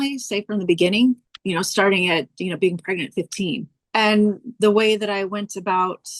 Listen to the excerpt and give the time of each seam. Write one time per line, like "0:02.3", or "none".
0:01.3
0:03.8